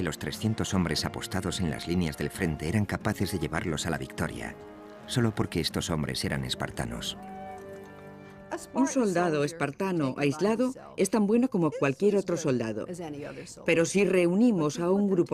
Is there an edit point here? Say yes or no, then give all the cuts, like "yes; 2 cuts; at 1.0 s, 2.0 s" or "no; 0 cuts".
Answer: yes; 1 cut; at 10.4 s